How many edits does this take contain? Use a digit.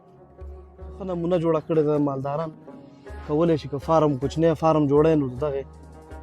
1